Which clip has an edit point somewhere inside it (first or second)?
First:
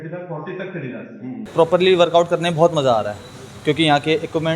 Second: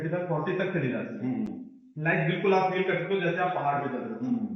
first